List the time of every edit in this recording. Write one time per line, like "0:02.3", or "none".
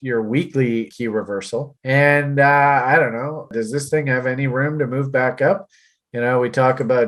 0:00.9
0:03.5